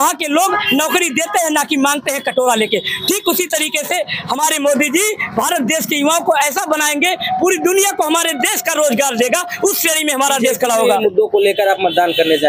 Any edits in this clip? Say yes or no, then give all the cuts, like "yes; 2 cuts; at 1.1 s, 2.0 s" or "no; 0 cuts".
yes; 1 cut; at 11.0 s